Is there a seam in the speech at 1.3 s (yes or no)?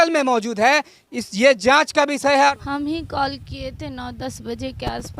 no